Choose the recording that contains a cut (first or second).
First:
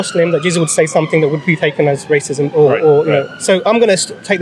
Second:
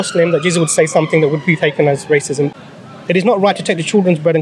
second